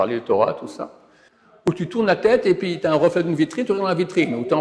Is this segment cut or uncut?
cut